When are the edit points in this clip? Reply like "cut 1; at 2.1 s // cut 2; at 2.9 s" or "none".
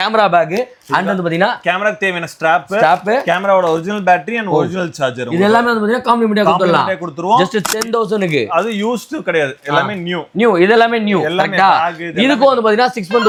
none